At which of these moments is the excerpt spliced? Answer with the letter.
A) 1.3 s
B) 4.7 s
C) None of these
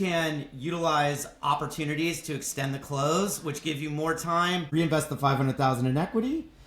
B